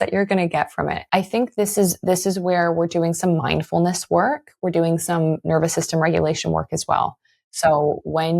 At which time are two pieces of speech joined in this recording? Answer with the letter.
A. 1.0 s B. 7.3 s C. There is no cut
A